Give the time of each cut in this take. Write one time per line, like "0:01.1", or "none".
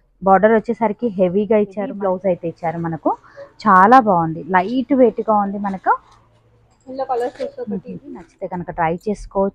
0:01.9
0:08.3